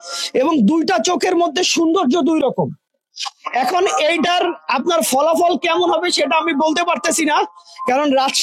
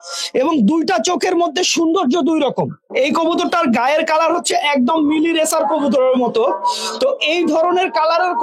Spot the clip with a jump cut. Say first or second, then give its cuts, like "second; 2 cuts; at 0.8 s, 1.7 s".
second; 1 cut; at 2.8 s